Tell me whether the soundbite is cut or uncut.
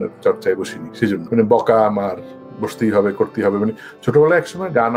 uncut